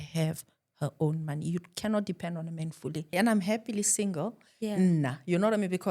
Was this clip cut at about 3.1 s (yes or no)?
yes